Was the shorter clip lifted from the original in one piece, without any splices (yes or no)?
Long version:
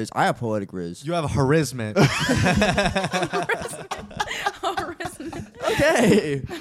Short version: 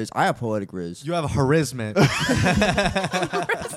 yes